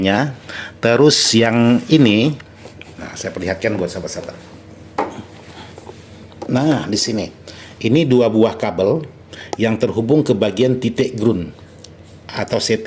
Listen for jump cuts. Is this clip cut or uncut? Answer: uncut